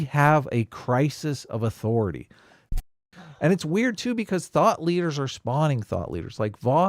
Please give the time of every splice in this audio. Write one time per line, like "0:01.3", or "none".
0:02.7